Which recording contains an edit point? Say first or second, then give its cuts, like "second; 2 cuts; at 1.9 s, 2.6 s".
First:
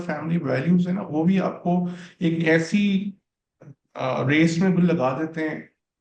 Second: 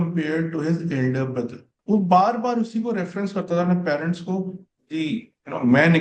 second; 1 cut; at 1.7 s